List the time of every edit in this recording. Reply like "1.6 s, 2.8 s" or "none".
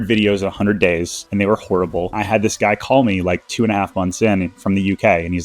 1.2 s, 2.1 s